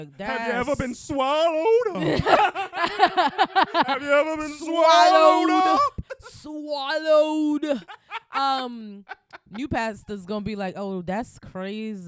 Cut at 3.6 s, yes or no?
no